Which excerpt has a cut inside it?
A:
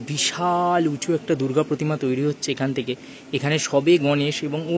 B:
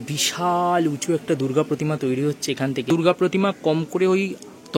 B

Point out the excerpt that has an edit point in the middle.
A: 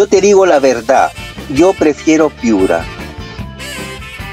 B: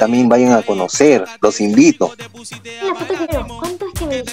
B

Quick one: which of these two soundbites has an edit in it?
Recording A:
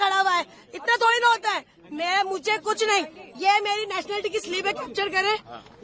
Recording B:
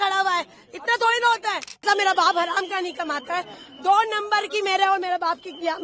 B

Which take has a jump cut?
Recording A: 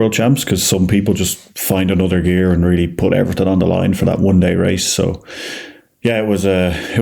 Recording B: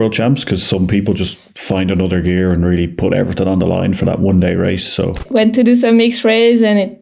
B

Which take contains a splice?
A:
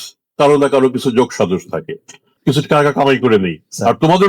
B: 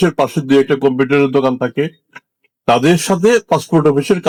A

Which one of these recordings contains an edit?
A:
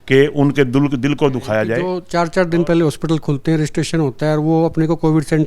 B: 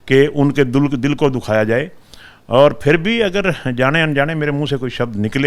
A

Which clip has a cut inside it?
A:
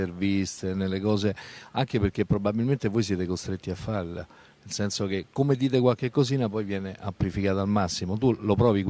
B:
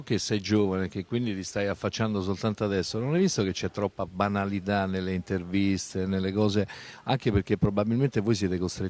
A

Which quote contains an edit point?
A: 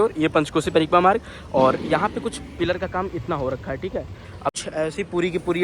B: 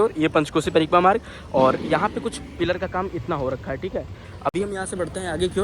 A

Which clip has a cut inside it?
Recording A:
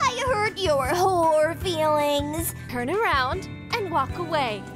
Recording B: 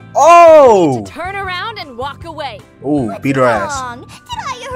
A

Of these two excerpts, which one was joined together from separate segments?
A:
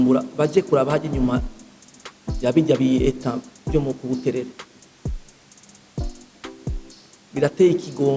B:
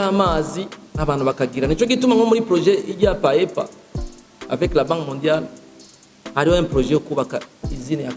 A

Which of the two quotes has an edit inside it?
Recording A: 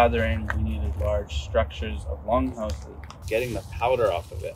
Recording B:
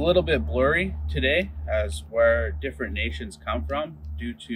A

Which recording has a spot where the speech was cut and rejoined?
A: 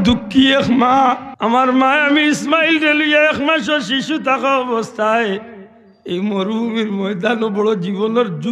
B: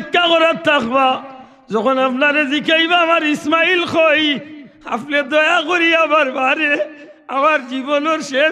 A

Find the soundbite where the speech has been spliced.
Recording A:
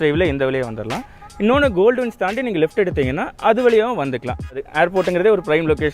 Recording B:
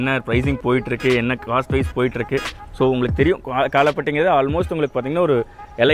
A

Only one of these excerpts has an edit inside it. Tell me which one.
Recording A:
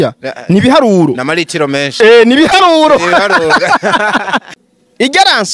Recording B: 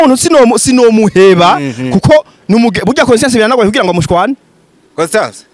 A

